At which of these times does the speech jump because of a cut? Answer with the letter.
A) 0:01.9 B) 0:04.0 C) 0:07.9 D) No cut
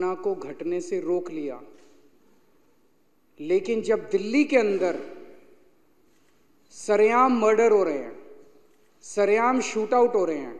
D